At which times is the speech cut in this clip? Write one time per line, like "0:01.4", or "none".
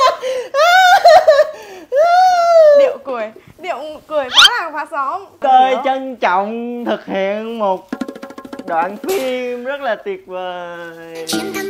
0:05.4